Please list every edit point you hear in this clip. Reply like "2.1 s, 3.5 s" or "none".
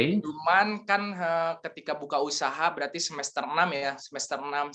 none